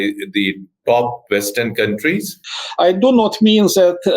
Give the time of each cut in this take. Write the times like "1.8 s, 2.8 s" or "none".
2.3 s